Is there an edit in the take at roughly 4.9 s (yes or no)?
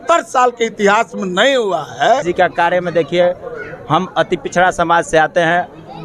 no